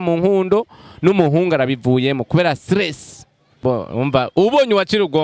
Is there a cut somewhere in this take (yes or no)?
yes